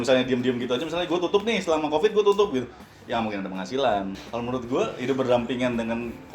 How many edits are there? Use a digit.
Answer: 1